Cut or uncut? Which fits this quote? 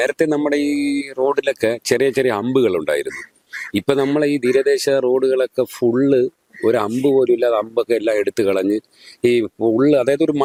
uncut